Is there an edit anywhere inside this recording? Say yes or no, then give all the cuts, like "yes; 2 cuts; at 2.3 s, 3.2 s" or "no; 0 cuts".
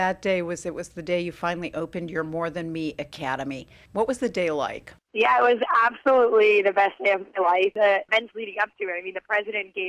no; 0 cuts